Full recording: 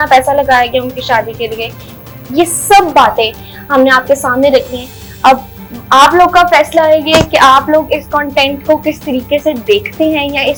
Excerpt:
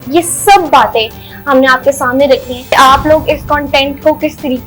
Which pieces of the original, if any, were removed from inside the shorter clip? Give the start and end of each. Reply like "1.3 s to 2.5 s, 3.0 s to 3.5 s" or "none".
4.9 s to 7.3 s

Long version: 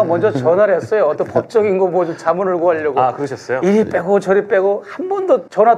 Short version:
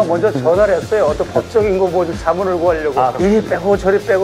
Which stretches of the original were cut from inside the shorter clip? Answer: 3.2 s to 3.6 s

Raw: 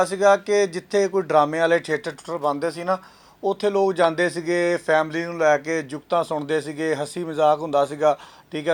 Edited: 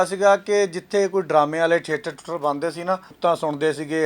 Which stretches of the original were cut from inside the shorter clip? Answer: 3.1 s to 6.0 s

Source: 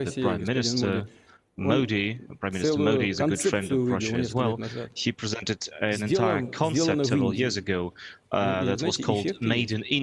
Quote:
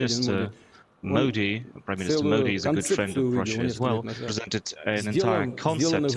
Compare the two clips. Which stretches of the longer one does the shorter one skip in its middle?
4.9 s to 5.3 s

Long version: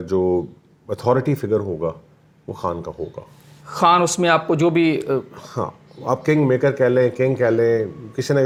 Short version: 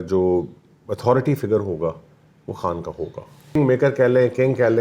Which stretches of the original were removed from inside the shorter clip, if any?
3.6 s to 6.4 s

